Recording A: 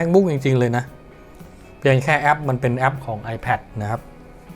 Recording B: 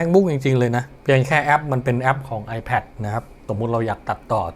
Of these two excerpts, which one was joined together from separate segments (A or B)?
B